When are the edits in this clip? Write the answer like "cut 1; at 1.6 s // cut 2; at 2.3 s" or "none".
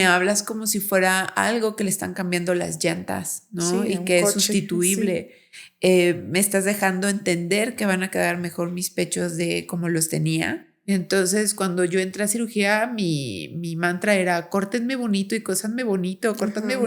cut 1; at 10.7 s